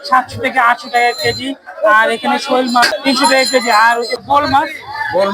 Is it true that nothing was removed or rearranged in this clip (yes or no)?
no